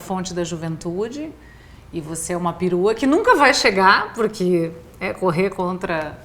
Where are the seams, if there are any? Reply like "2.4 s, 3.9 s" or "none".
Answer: none